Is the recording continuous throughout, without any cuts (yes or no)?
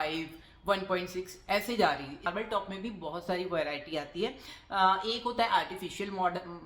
no